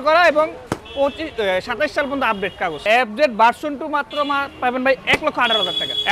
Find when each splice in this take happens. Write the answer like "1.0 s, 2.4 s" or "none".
2.8 s